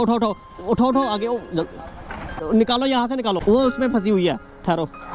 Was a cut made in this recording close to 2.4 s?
yes; 2 cuts; at 2.4 s, 3.4 s

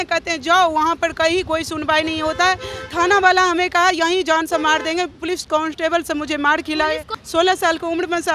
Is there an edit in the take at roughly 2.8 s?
no; 1 cut; at 7.1 s

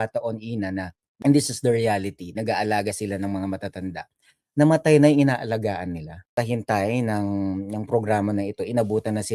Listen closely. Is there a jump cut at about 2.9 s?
no; 2 cuts; at 1.0 s, 6.3 s

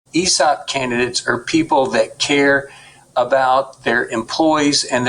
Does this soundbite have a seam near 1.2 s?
no; 0 cuts

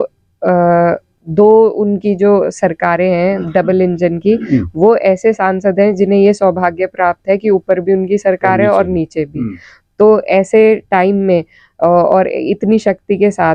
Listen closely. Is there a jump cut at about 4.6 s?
no; 0 cuts

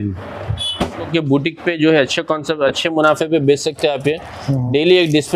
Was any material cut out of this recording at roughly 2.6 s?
no; 1 cut; at 1.1 s

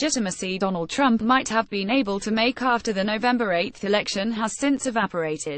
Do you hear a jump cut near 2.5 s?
no; 1 cut; at 4.5 s

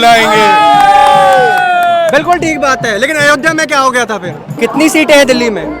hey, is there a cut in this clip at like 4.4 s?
yes; 1 cut; at 4.4 s

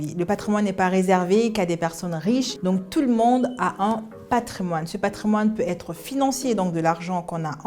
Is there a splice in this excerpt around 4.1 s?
no; 1 cut; at 2.5 s

